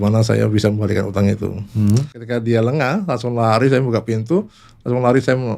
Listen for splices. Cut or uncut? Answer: cut